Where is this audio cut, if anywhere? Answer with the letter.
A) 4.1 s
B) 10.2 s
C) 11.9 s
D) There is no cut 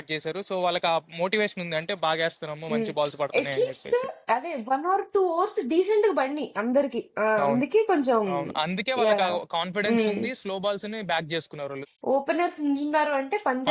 C